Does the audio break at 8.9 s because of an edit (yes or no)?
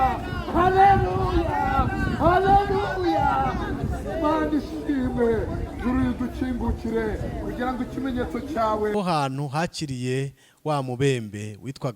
yes